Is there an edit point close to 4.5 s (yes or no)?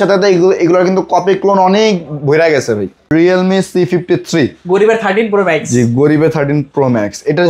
no